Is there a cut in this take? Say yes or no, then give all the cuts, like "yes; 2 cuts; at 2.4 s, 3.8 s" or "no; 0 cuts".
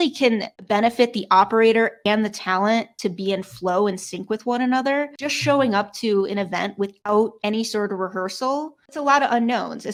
no; 0 cuts